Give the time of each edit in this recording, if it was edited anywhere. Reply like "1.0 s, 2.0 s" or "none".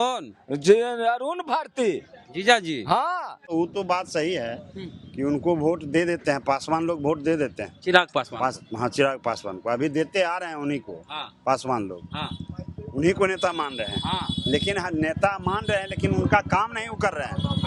3.4 s